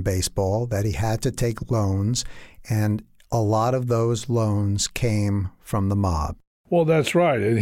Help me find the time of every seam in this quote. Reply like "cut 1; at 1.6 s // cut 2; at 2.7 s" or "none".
cut 1; at 6.4 s